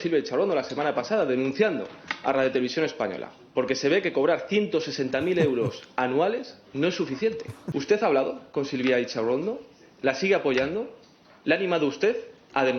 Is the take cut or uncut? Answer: cut